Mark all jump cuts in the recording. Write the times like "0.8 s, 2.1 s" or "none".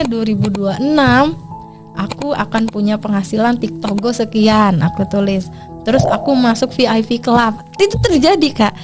none